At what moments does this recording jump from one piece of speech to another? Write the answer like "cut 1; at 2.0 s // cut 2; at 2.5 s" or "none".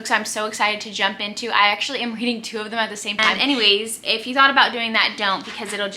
cut 1; at 3.3 s